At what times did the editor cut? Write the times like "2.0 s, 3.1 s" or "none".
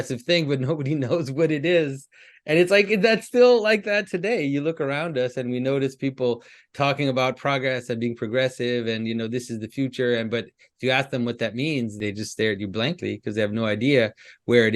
12.0 s